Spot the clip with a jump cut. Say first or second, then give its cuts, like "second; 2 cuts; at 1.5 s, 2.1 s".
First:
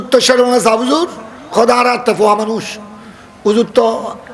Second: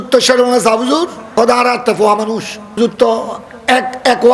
second; 2 cuts; at 1.2 s, 2.8 s